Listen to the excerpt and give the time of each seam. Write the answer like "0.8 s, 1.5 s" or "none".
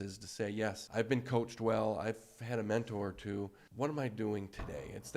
0.8 s, 3.6 s